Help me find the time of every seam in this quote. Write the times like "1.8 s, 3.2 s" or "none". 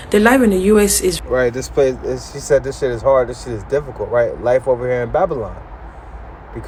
none